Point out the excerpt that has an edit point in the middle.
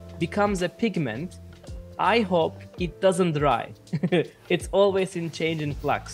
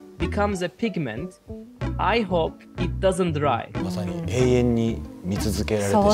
second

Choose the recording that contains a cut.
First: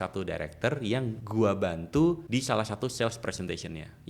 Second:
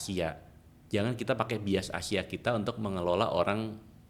first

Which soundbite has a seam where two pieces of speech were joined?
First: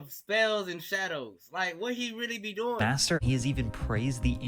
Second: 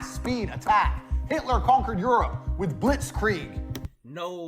first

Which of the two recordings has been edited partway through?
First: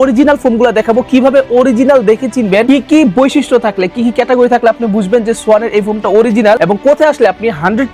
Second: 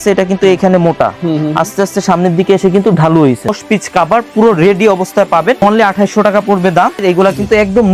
second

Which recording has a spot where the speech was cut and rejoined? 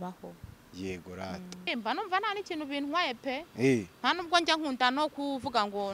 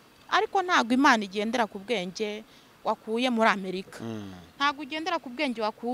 first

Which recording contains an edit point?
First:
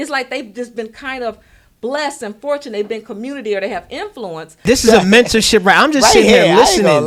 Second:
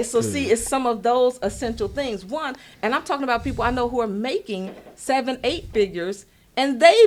first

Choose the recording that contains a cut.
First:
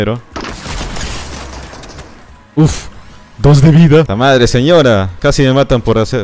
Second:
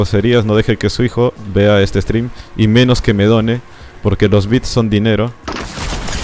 first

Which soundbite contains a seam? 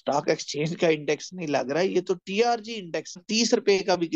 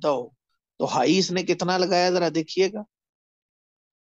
first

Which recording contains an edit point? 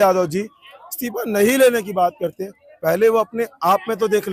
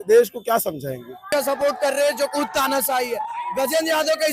second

